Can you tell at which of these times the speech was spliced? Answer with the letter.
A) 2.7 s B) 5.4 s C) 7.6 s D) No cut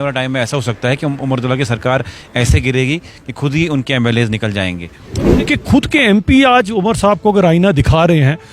B